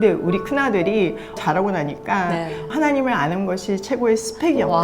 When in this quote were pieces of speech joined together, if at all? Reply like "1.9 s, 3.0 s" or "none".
1.4 s, 2.7 s